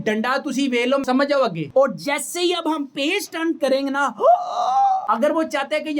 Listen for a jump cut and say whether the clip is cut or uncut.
cut